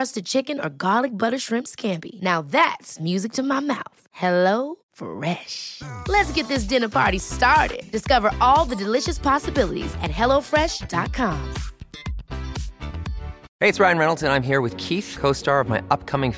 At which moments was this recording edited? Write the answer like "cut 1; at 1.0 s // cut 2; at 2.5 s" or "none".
cut 1; at 13.4 s